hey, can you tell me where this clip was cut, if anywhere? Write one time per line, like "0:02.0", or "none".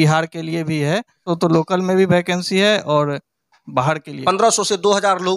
0:01.2
0:04.2